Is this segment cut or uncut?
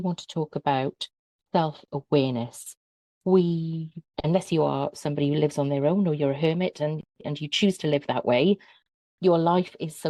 uncut